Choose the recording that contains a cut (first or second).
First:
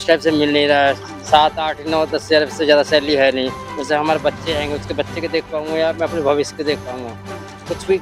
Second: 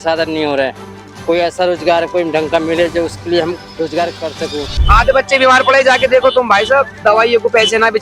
second